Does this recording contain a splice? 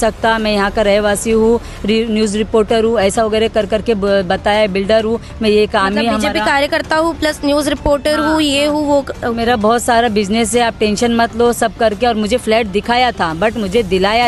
no; 0 cuts

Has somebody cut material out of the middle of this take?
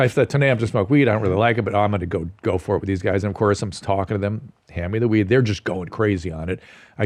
no; 0 cuts

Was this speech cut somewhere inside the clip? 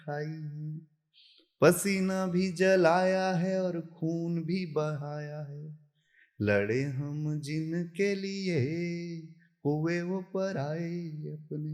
no; 0 cuts

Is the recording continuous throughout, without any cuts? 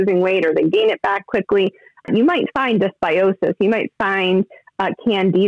no; 1 cut; at 2.1 s

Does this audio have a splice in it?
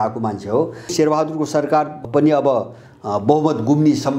yes; 2 cuts; at 0.9 s, 2.0 s

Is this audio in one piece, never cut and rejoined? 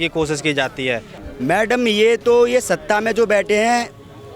no; 1 cut; at 1.2 s

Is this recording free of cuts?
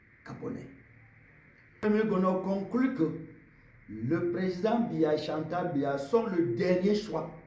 no; 1 cut; at 1.8 s

